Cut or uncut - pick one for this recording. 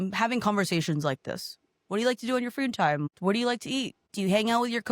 cut